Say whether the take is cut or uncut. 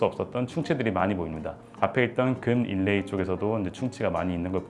uncut